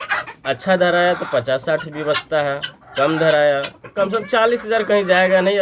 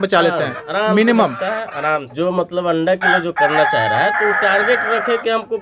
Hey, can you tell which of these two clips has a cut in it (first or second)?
second